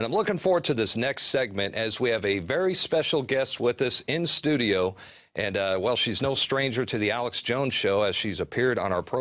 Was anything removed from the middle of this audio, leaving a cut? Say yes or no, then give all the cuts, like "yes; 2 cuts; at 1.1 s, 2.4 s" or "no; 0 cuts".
no; 0 cuts